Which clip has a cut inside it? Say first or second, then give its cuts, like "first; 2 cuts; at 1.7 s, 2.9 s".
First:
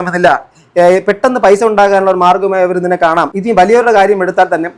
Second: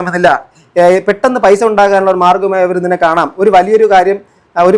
first; 1 cut; at 3.3 s